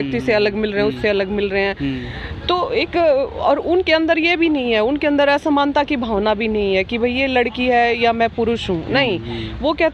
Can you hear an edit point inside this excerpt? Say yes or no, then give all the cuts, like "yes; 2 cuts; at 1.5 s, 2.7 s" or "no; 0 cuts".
no; 0 cuts